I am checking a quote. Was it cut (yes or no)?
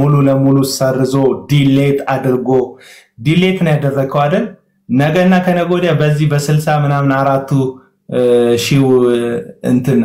no